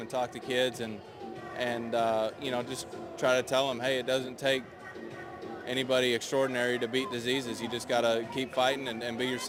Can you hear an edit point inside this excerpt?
no; 0 cuts

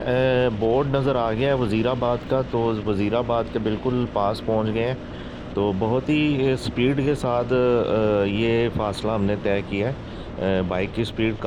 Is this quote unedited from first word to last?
yes; 0 cuts

